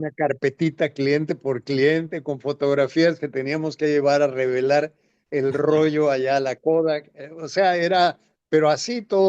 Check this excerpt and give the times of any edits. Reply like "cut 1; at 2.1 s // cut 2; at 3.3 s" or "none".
none